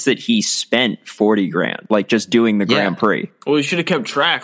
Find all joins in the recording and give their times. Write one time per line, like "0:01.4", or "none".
0:01.8
0:03.3